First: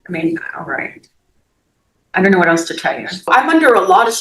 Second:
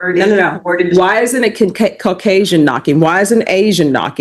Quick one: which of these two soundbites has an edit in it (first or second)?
first